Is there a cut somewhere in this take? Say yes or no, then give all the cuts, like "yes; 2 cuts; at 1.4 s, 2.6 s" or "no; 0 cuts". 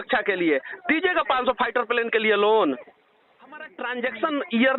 yes; 1 cut; at 3.7 s